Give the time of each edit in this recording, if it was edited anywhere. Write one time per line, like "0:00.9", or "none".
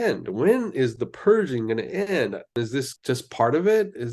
0:02.5